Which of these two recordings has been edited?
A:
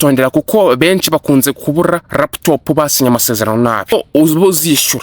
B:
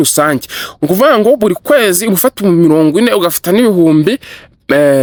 A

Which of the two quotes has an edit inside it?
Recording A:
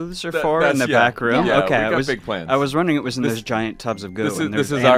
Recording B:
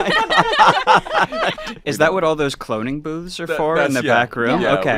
B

